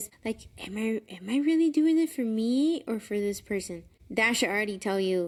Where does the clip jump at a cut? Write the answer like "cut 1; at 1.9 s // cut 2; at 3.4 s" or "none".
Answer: none